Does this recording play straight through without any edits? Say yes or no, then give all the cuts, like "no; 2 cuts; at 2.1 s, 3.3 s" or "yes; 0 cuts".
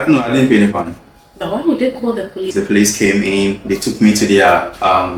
no; 1 cut; at 2.5 s